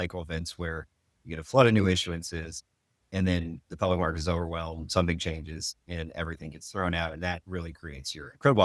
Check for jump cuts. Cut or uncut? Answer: uncut